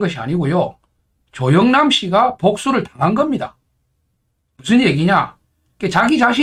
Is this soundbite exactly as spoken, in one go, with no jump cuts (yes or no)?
yes